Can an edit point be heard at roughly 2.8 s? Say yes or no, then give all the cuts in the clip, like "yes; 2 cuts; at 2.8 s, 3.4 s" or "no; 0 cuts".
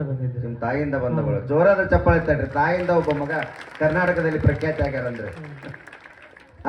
no; 0 cuts